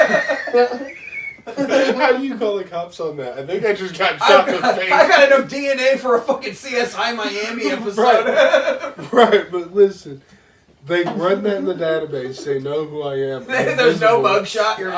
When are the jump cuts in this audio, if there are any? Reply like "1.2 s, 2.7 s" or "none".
none